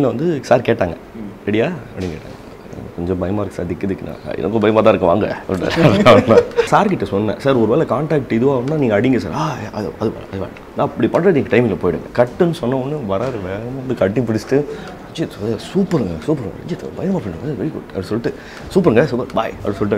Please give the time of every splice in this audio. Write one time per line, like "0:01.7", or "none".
0:06.7
0:12.1

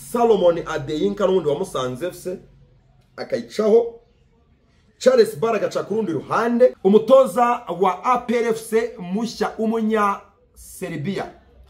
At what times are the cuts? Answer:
0:06.8

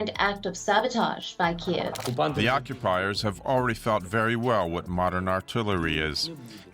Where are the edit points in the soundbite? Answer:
0:02.0

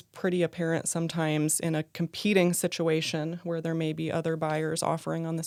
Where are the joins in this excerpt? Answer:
none

